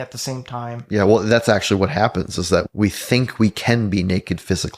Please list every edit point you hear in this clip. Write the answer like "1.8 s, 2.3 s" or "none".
2.7 s